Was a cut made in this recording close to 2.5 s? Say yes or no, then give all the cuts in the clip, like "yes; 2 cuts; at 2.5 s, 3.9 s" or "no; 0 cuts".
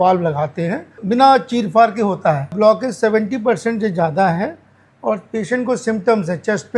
yes; 2 cuts; at 1.0 s, 2.5 s